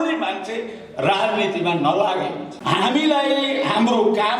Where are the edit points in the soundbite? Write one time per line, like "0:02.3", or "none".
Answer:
0:02.5